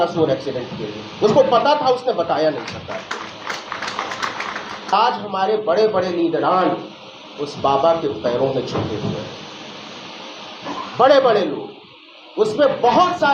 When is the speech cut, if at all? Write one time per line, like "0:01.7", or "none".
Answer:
0:04.9